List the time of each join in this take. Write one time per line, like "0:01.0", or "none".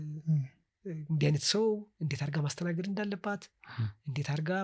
none